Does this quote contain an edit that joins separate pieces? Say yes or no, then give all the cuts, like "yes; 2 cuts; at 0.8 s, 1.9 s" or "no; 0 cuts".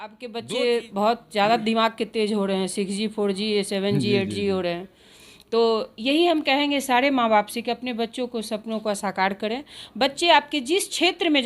no; 0 cuts